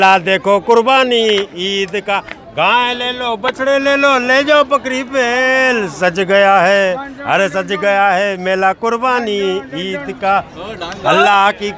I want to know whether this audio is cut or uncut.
uncut